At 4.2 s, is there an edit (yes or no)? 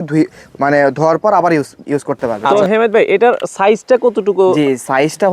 no